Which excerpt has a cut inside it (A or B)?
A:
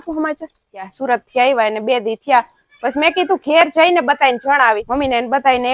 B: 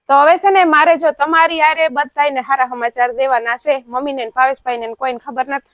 A